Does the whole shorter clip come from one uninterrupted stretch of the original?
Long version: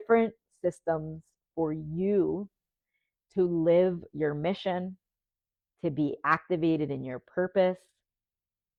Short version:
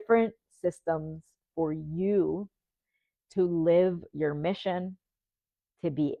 yes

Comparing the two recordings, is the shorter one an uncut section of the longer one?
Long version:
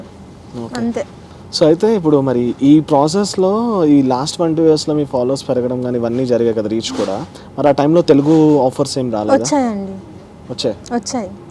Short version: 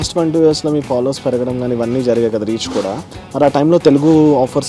yes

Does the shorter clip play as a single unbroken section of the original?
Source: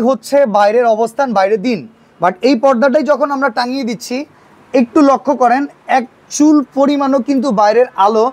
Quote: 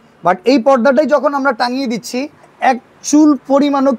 no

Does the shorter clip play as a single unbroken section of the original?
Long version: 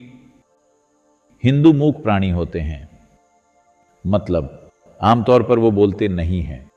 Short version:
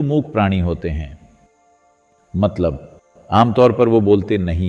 yes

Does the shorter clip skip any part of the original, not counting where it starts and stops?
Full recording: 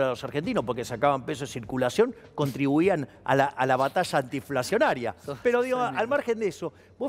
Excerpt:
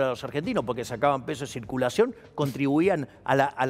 no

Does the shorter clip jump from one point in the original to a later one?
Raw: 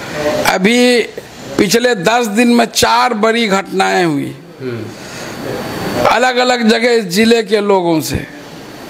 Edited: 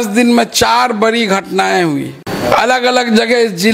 yes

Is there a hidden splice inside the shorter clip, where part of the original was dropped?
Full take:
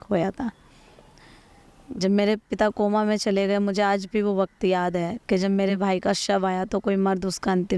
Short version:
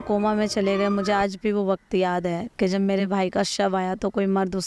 no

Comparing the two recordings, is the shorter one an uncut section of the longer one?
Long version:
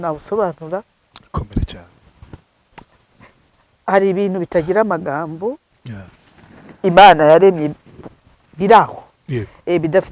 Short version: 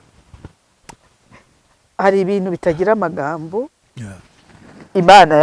yes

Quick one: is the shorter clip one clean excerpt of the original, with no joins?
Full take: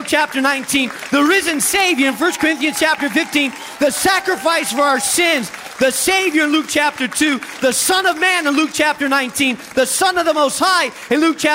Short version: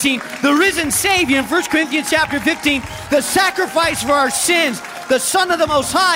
no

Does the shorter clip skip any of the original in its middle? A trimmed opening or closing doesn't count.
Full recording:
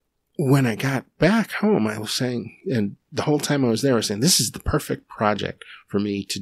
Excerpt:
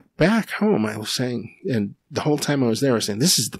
no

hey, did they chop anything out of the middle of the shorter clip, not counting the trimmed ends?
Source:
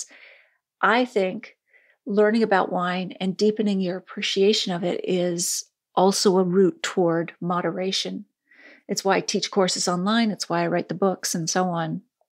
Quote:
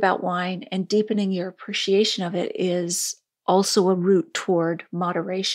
no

